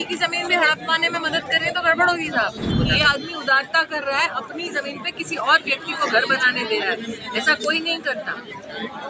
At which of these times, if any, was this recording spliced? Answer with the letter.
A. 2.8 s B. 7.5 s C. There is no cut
A